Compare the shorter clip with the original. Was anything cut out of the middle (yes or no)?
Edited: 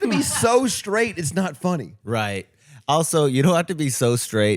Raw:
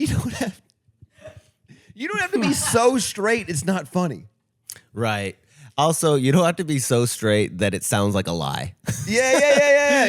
yes